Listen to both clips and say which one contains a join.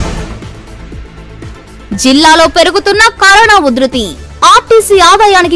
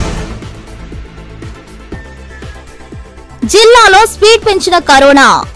first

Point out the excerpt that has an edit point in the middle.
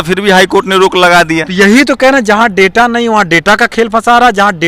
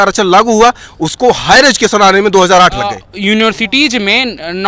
second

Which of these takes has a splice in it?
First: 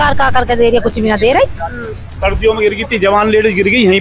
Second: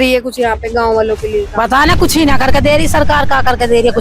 first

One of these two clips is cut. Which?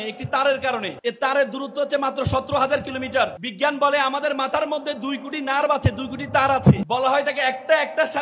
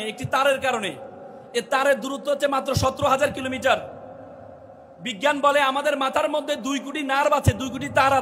first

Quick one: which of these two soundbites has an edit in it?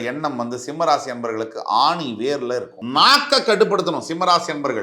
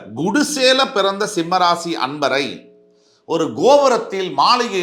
first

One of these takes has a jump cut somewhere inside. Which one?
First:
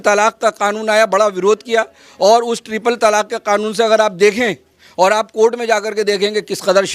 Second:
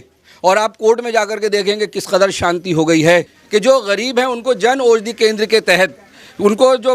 second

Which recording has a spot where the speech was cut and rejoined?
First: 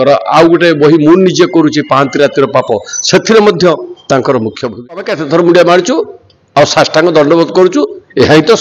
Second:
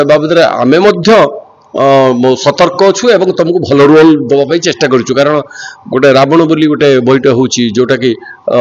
first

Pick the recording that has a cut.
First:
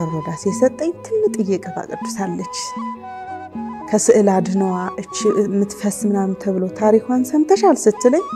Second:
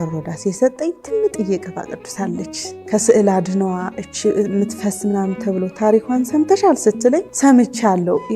second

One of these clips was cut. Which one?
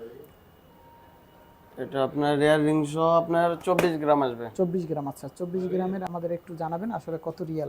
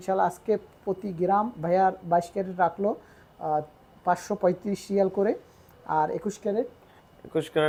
first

